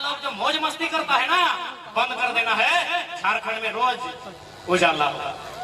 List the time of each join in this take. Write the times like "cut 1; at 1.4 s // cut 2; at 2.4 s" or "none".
none